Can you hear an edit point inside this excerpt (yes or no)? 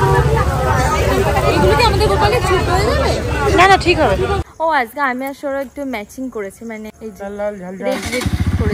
yes